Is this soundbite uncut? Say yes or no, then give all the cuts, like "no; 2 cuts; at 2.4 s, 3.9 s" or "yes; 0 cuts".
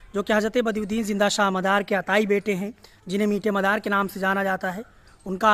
yes; 0 cuts